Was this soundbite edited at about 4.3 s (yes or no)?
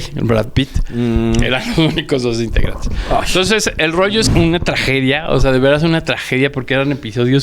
yes